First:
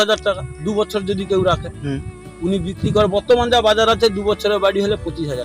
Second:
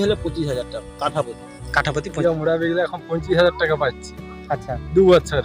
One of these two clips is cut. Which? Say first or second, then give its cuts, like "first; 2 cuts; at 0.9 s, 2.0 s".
second; 1 cut; at 2.2 s